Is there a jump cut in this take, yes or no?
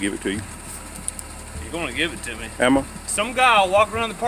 yes